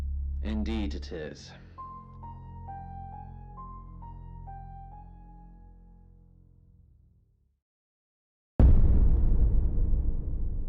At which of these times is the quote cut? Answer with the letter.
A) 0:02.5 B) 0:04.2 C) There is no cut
B